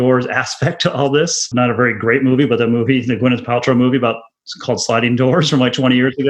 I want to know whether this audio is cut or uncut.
cut